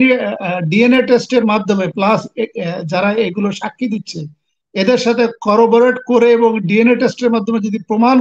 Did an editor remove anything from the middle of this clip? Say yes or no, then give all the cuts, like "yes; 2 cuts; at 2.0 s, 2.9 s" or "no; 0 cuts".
no; 0 cuts